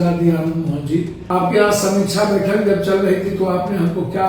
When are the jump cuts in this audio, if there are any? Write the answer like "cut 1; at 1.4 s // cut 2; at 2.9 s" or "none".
cut 1; at 1.2 s